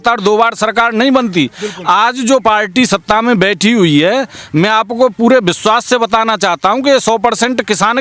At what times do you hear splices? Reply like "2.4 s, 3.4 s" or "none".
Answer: none